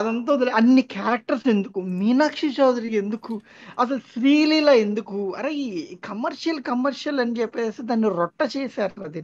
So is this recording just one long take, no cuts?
yes; 0 cuts

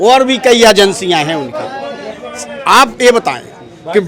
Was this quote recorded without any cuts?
yes; 0 cuts

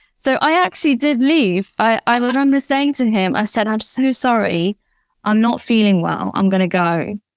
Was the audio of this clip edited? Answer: no; 0 cuts

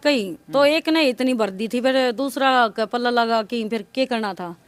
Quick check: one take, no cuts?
yes; 0 cuts

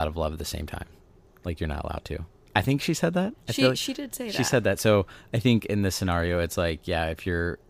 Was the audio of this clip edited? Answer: no; 0 cuts

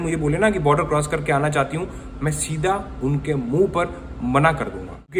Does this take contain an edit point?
no; 0 cuts

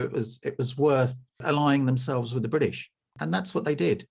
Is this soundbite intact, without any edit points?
no; 2 cuts; at 1.4 s, 3.2 s

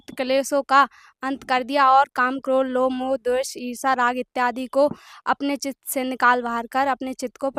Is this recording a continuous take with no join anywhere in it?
yes; 0 cuts

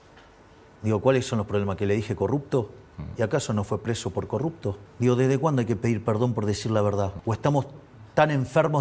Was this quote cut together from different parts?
yes; 3 cuts; at 0.8 s, 4.9 s, 7.2 s

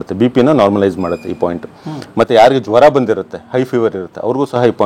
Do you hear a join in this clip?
no; 0 cuts

